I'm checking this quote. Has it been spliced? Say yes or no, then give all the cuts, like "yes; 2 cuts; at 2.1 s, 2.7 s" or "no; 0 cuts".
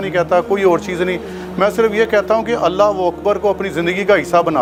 no; 0 cuts